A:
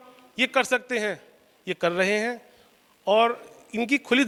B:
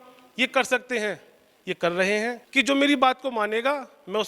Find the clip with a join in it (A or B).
B